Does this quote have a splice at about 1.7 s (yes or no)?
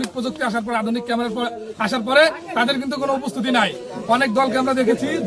no